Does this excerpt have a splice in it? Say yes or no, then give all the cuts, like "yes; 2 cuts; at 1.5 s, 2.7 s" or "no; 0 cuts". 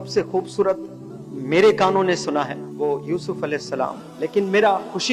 yes; 2 cuts; at 2.6 s, 4.0 s